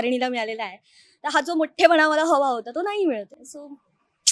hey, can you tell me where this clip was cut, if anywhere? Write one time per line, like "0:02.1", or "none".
none